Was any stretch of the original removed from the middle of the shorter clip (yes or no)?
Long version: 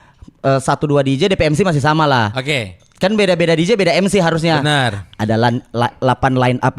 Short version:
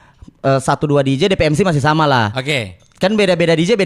no